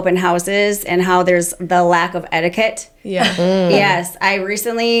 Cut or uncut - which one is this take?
uncut